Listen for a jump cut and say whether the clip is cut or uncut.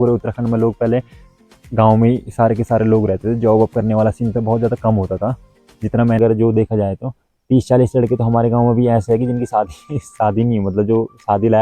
cut